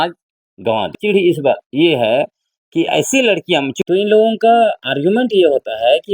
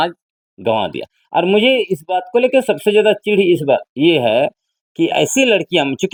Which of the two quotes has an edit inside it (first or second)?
first